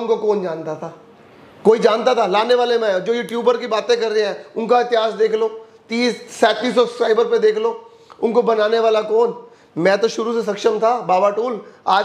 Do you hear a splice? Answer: no; 0 cuts

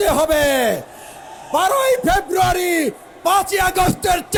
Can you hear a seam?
no; 0 cuts

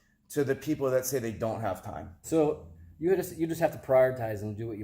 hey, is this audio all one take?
no; 1 cut; at 2.2 s

